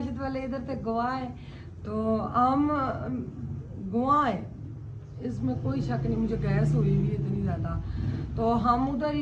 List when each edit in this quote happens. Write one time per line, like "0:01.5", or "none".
none